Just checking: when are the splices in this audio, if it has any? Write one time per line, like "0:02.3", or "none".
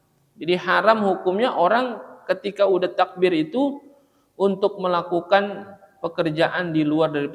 none